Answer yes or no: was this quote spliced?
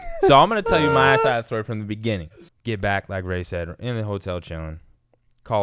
yes